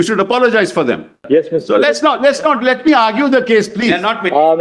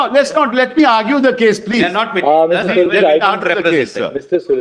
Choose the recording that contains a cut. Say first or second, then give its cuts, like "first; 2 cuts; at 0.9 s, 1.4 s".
first; 1 cut; at 1.1 s